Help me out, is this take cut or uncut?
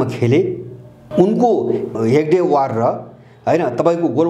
cut